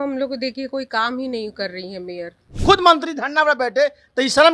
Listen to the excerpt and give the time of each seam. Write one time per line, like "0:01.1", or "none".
0:02.5